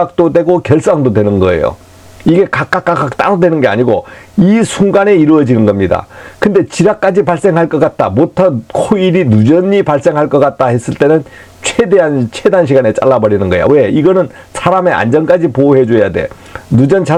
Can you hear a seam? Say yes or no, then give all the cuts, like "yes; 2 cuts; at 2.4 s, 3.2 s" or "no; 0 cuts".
no; 0 cuts